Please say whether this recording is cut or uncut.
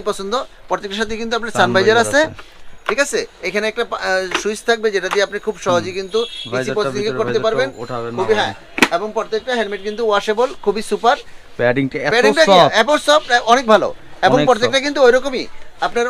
uncut